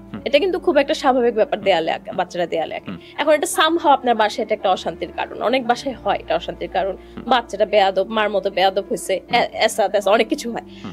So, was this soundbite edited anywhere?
no; 0 cuts

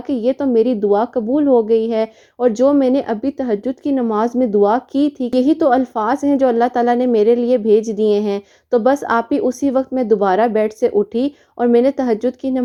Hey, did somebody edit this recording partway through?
no; 0 cuts

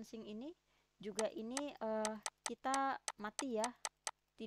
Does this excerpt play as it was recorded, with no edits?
yes; 0 cuts

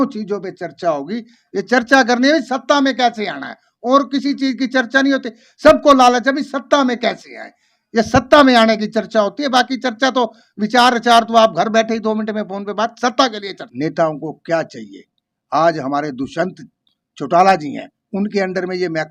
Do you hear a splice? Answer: yes; 1 cut; at 13.6 s

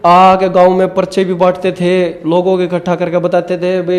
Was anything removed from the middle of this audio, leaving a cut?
no; 0 cuts

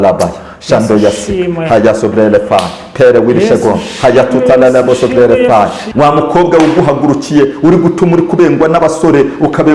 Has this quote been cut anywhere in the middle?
yes; 1 cut; at 5.8 s

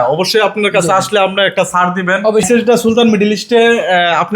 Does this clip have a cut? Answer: yes; 1 cut; at 2.5 s

